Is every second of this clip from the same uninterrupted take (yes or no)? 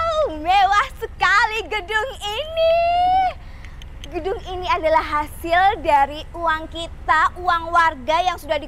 yes